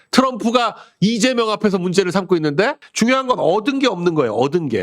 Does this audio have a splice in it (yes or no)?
yes